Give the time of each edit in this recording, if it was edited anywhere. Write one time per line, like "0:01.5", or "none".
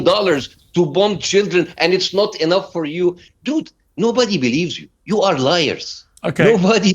0:03.2